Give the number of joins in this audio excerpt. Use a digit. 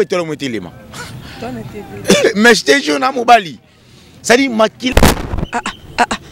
1